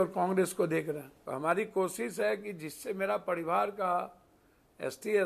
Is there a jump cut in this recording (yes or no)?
yes